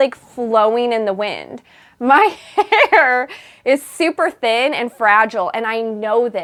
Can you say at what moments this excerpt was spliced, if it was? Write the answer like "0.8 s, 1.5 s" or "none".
none